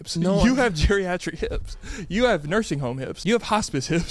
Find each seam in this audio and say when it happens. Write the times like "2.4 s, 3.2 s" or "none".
3.1 s